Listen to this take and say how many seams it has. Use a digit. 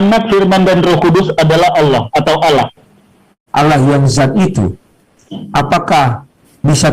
1